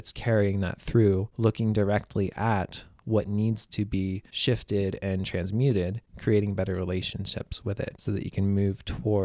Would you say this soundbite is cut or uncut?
cut